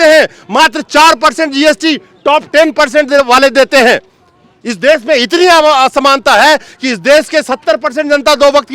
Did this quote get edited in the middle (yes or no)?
no